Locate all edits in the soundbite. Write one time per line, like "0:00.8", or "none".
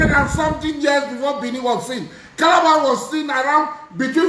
none